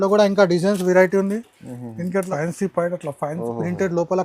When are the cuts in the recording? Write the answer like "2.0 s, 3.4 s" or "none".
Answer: 2.3 s